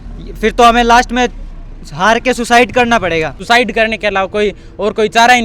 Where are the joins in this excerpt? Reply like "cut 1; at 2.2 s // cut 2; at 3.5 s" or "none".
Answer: cut 1; at 3.4 s